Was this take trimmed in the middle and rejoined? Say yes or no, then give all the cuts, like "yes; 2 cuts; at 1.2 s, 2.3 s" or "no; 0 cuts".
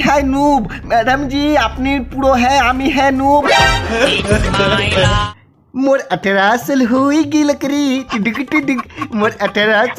yes; 1 cut; at 5.2 s